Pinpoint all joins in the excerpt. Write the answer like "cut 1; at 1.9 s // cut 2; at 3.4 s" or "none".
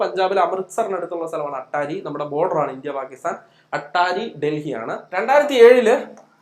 cut 1; at 5.0 s